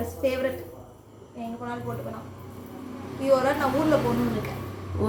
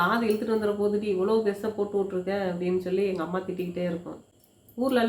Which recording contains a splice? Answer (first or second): second